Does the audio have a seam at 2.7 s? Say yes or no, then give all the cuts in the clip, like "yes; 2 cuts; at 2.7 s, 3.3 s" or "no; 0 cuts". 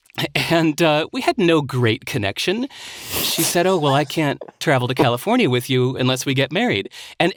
no; 0 cuts